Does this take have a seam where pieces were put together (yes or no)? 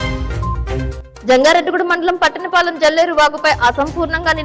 yes